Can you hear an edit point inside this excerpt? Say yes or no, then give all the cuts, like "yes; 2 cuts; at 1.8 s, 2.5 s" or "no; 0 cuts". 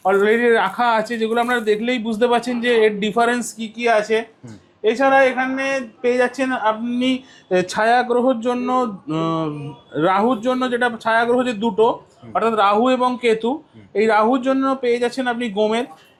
no; 0 cuts